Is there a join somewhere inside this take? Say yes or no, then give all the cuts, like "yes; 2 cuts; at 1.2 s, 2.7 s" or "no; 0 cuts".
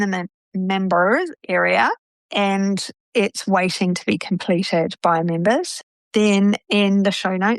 yes; 1 cut; at 5.8 s